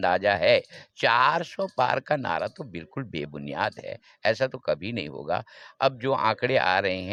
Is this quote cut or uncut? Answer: uncut